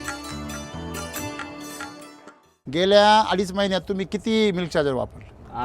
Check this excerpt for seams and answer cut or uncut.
cut